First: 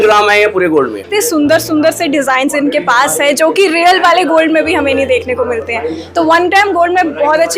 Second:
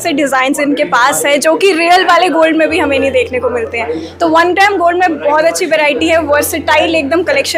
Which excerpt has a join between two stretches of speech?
first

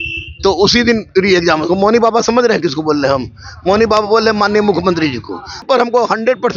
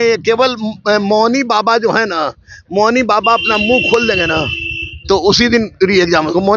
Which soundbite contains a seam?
first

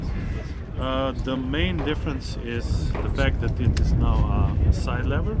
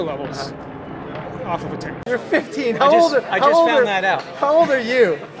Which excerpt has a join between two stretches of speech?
second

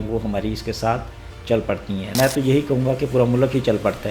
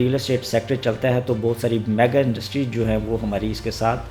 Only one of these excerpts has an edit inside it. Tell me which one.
first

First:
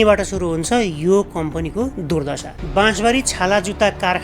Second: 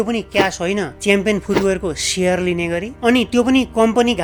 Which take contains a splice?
first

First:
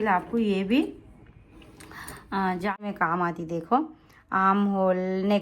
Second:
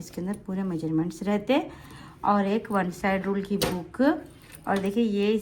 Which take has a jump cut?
first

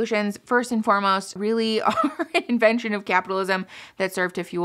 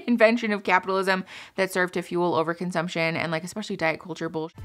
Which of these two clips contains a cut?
first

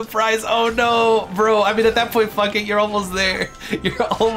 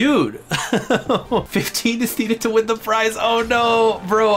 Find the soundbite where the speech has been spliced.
second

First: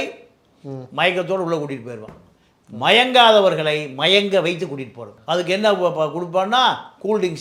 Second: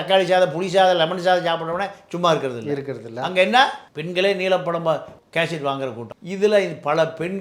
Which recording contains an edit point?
second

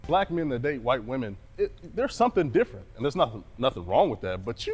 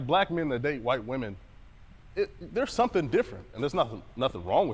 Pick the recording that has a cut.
first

